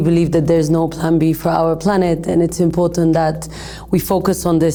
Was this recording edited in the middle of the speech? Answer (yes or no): no